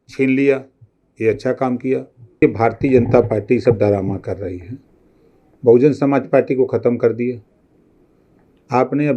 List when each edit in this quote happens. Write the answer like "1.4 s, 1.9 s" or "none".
2.4 s

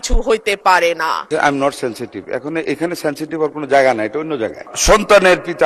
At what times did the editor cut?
1.3 s, 4.7 s

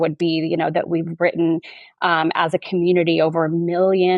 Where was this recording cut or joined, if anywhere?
none

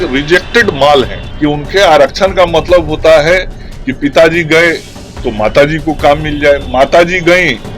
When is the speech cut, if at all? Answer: 1.2 s

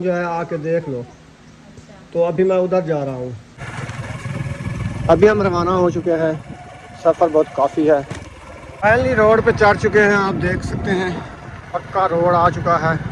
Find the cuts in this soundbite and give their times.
3.6 s, 8.7 s

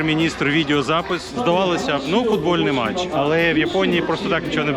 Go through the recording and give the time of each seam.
1.3 s, 3.1 s

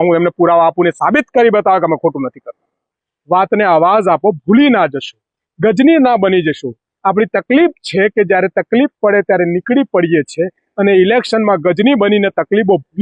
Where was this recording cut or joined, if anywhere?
3.1 s

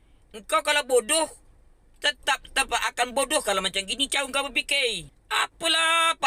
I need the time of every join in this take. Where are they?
5.1 s

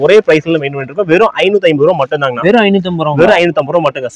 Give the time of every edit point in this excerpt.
none

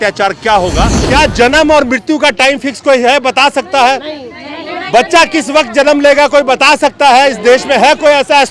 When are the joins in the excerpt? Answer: 1.0 s

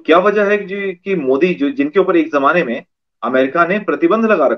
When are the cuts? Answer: none

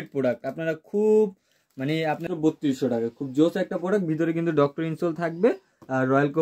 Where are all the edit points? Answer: 2.2 s

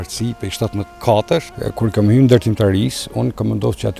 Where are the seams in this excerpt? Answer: 1.0 s, 1.6 s

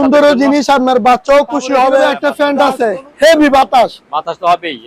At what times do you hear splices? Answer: 2.1 s

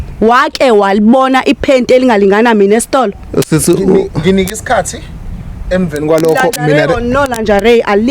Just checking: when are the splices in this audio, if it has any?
none

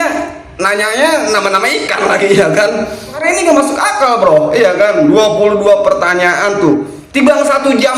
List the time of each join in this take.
3.2 s, 7.0 s

